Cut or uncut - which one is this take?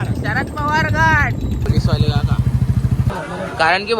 cut